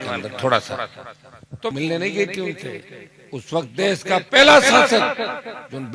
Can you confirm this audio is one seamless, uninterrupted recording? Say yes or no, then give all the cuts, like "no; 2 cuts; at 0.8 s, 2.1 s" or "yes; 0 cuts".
no; 1 cut; at 1.7 s